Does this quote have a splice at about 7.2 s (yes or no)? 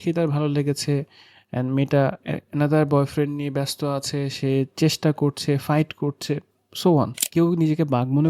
yes